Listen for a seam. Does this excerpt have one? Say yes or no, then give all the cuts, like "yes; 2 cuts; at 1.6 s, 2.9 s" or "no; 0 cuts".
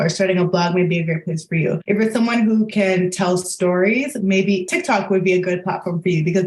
yes; 1 cut; at 1.8 s